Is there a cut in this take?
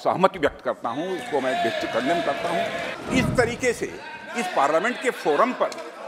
yes; 1 cut; at 2.9 s

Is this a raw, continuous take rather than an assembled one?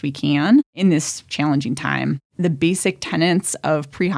no; 2 cuts; at 0.8 s, 2.3 s

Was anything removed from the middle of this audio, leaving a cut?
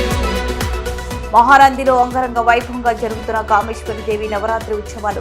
no; 0 cuts

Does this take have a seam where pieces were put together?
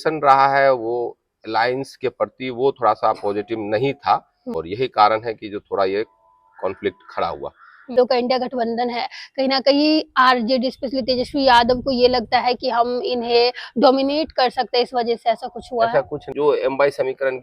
yes; 3 cuts; at 4.6 s, 7.9 s, 16.3 s

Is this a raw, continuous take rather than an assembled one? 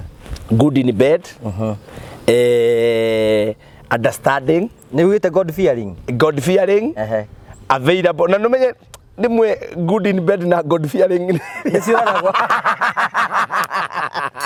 yes; 0 cuts

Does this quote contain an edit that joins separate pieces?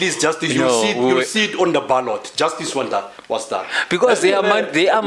no; 0 cuts

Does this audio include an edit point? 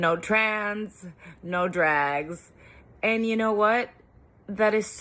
no; 0 cuts

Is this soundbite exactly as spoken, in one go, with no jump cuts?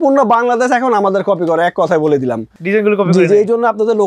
yes; 0 cuts

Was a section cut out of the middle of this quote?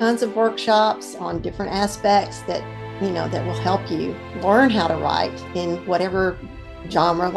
yes; 1 cut; at 4.2 s

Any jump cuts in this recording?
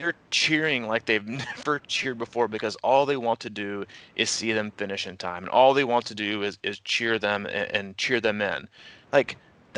no; 0 cuts

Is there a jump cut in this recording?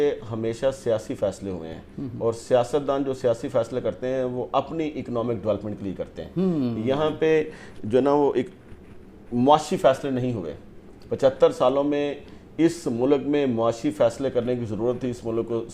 no; 0 cuts

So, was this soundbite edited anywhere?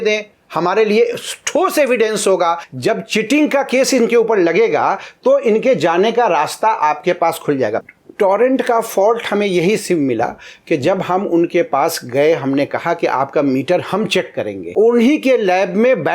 yes; 3 cuts; at 2.7 s, 7.8 s, 14.6 s

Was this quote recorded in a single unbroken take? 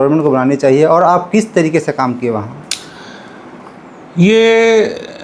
yes; 0 cuts

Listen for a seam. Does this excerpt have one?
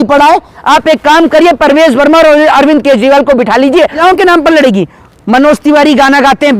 yes; 1 cut; at 4.0 s

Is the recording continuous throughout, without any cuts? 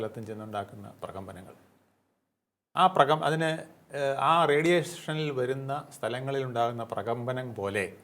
yes; 0 cuts

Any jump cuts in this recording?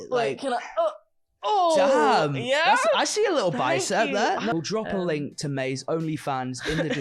yes; 1 cut; at 4.5 s

